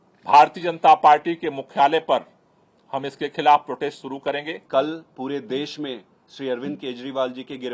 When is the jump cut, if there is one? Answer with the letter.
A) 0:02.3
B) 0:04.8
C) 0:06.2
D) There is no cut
D